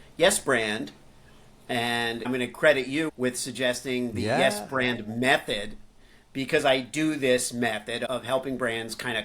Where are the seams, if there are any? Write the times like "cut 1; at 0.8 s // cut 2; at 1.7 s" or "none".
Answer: cut 1; at 2.2 s // cut 2; at 8.0 s